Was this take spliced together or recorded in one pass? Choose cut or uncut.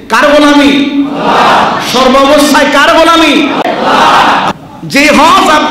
cut